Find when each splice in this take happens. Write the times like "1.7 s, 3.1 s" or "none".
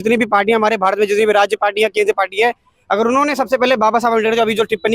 none